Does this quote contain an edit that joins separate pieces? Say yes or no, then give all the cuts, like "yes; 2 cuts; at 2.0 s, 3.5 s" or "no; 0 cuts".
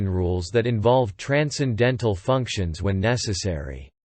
no; 0 cuts